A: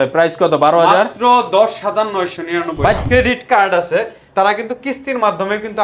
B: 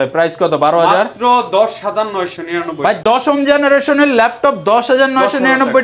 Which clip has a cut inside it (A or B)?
A